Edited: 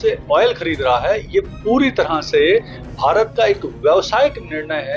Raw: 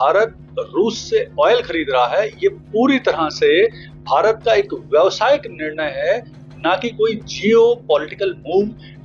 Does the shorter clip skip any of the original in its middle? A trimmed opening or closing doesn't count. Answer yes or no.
no